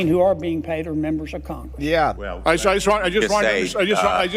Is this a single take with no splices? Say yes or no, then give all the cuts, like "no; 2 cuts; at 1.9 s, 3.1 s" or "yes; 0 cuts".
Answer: no; 1 cut; at 2.2 s